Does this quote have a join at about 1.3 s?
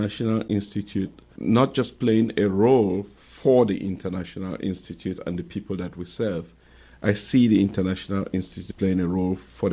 yes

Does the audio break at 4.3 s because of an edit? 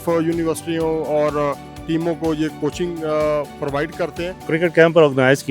yes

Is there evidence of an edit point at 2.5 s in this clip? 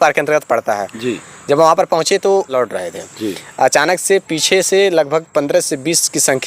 yes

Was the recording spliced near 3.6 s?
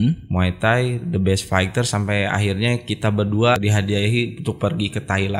yes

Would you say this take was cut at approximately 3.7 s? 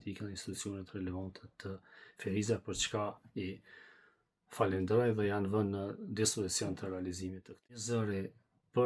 no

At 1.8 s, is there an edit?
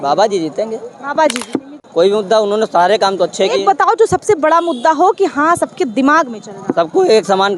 yes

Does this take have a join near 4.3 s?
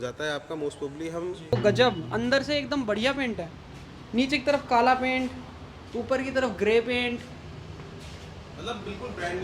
no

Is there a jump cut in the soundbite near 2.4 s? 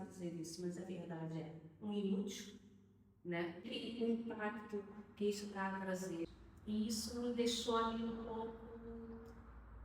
no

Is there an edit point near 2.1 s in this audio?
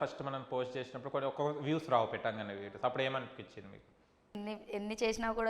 no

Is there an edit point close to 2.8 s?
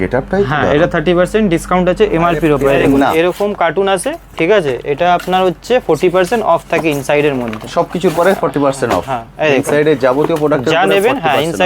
yes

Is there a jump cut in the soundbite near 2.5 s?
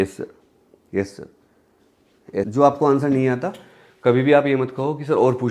yes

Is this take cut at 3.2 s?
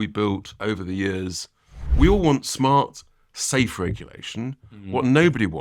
no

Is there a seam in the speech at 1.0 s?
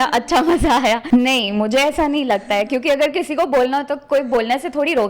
yes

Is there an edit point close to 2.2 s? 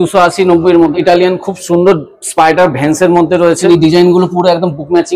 no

